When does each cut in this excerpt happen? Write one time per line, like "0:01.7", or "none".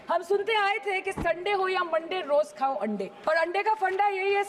0:03.1